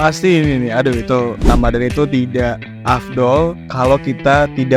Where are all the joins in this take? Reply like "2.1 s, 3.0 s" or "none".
1.5 s